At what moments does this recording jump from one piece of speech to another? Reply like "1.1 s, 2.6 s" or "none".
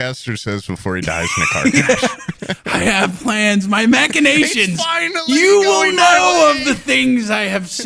none